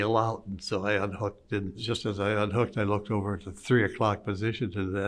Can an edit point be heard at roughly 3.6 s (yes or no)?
no